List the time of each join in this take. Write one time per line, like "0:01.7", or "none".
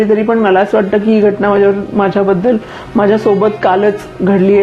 none